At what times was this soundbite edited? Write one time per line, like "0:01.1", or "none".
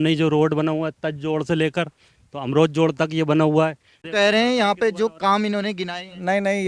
0:03.9

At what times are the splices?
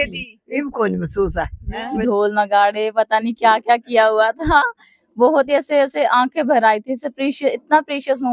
0:02.0

